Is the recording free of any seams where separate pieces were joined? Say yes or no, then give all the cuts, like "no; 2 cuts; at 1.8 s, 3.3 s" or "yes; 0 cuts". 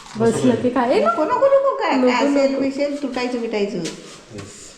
yes; 0 cuts